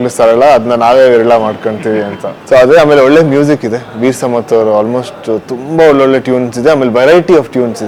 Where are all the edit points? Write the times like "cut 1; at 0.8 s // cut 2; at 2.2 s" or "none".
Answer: none